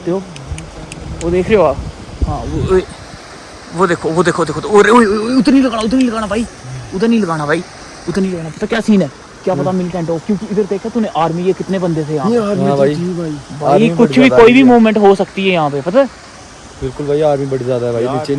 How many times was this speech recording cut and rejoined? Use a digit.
0